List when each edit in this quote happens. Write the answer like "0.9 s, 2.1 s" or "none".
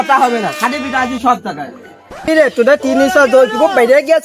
2.3 s